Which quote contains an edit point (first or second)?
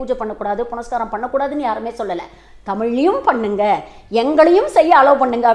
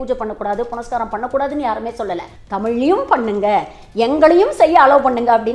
second